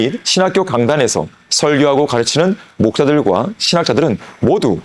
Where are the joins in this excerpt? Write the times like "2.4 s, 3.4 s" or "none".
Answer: none

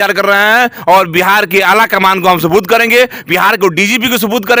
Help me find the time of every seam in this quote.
none

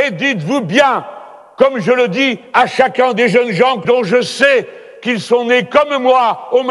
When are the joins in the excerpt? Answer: 3.8 s

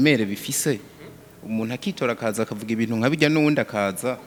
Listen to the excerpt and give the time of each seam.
none

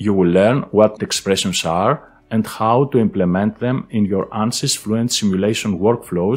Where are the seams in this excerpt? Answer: 1.0 s

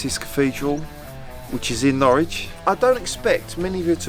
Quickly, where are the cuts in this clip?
2.5 s

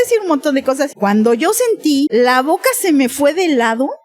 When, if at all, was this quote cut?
0.9 s, 2.1 s

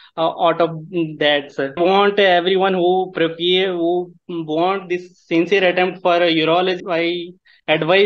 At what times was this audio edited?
1.8 s, 6.8 s

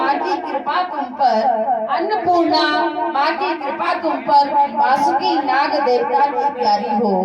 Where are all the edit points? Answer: none

